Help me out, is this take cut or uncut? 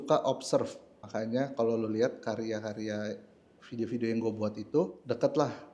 cut